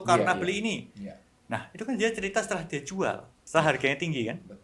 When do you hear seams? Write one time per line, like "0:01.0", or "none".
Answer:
0:03.3